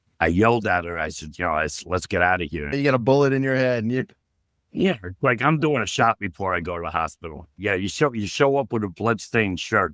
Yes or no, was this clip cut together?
yes